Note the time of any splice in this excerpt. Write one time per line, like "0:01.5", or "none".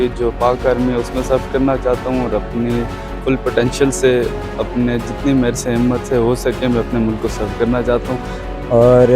none

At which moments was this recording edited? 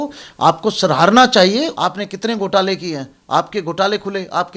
0:01.7

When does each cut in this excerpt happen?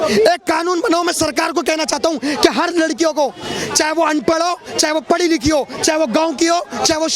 none

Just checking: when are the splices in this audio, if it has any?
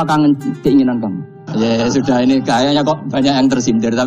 0:01.4

